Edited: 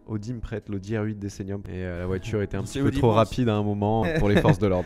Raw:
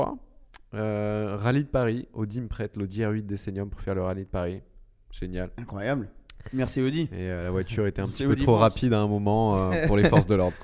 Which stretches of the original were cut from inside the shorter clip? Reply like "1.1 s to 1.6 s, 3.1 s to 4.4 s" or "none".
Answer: 3.8 s to 7.1 s, 9.5 s to 9.7 s

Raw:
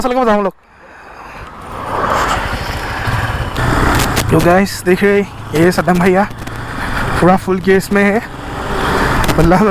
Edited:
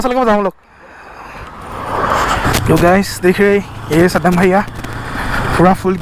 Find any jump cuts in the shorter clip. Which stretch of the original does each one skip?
2.4 s to 4.1 s

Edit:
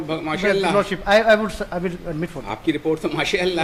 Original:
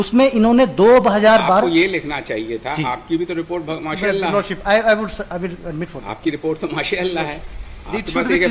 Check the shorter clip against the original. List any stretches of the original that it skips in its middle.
none

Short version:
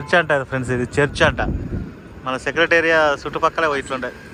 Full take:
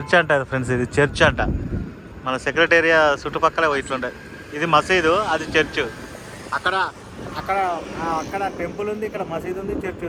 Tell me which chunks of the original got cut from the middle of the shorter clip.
none

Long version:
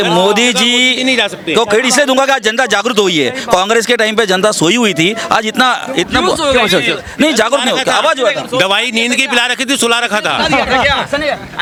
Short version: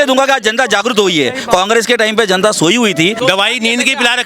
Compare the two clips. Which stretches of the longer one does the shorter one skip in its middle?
5.2 s to 8.5 s

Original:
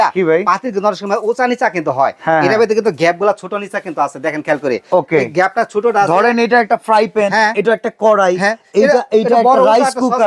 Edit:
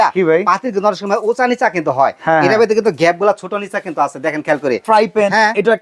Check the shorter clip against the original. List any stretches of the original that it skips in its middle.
4.8 s to 6.8 s

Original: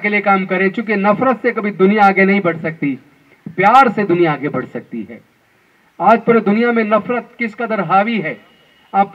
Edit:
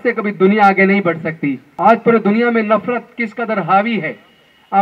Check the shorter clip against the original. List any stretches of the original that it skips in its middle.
3.0 s to 5.9 s

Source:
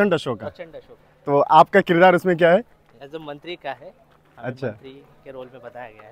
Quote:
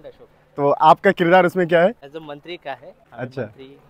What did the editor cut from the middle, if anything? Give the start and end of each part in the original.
3.2 s to 3.8 s

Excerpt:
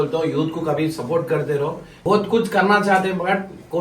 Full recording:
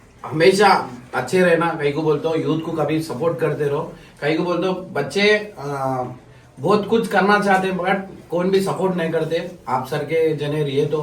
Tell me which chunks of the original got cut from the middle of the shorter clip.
4.0 s to 6.5 s

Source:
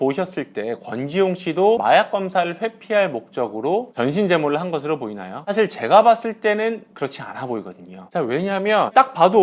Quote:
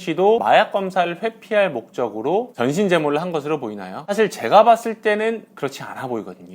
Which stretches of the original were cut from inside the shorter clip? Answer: none

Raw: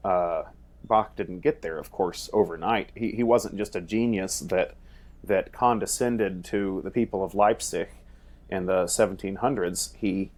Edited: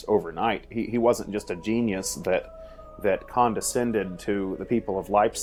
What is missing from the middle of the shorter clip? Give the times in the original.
none

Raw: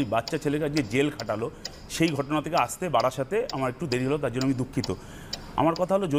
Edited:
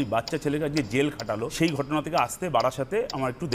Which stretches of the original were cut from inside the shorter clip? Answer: 1.5 s to 1.9 s

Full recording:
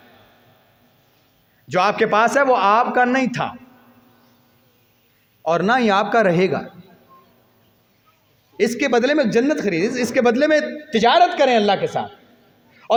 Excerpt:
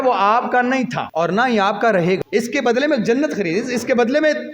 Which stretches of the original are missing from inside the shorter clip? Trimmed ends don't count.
3.5 s to 5.3 s, 6.6 s to 8.5 s

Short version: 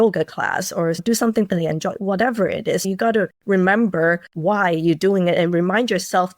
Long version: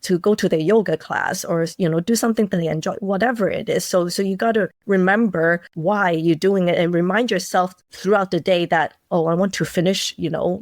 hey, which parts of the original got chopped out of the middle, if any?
1.7 s to 2.0 s, 3.9 s to 4.3 s

